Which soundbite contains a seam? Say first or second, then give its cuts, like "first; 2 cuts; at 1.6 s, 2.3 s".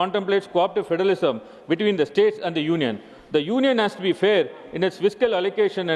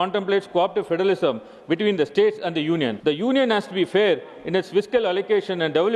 second; 1 cut; at 3.0 s